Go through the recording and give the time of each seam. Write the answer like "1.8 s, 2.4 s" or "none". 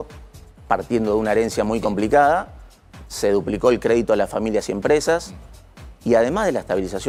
none